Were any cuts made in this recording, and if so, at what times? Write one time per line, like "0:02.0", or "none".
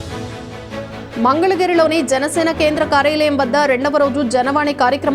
0:01.1